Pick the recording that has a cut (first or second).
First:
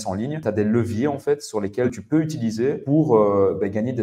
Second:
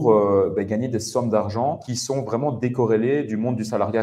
second